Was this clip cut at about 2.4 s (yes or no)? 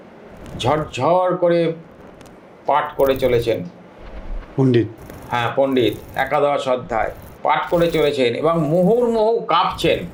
no